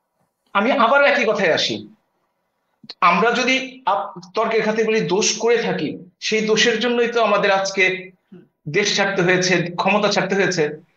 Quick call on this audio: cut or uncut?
uncut